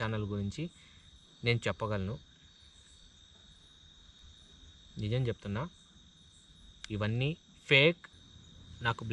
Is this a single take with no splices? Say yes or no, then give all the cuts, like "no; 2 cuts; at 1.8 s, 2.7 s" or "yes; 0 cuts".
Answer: no; 1 cut; at 8.1 s